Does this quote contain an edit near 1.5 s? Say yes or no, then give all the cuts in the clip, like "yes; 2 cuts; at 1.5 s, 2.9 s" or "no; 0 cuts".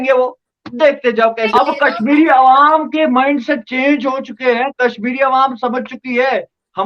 yes; 1 cut; at 1.5 s